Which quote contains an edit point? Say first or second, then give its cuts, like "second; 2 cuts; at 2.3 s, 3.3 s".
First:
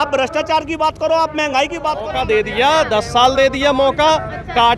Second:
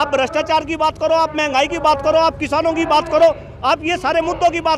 first; 1 cut; at 1.9 s